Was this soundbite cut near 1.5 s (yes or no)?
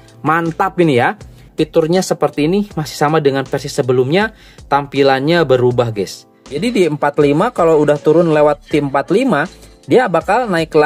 yes